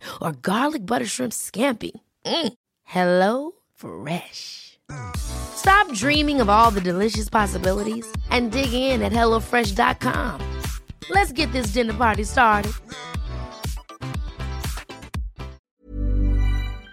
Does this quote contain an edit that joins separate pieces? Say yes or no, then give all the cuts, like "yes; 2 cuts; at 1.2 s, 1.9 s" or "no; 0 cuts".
yes; 1 cut; at 15.6 s